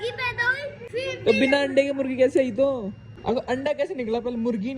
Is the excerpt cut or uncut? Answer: cut